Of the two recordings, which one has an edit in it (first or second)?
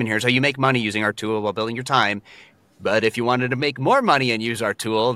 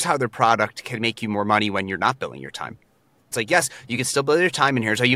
second